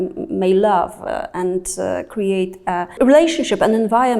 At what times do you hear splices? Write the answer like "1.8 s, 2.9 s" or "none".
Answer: 3.0 s